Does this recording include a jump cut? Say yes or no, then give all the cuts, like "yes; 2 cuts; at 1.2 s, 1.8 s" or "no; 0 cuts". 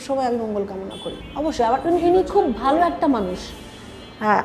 yes; 1 cut; at 1.2 s